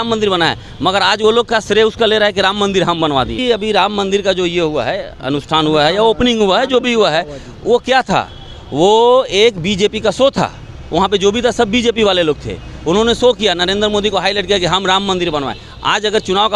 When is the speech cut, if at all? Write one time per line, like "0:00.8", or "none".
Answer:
0:03.4